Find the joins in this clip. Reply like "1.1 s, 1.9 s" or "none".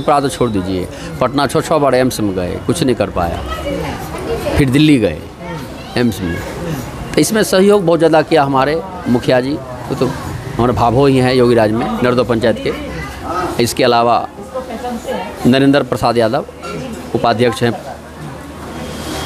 none